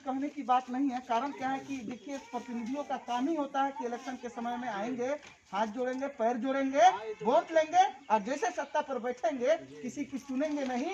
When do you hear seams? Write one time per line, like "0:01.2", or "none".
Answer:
none